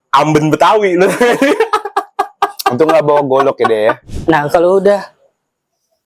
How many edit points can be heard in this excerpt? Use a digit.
1